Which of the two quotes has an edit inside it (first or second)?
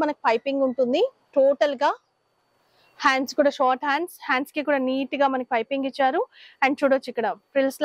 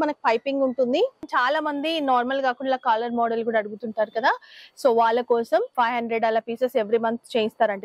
second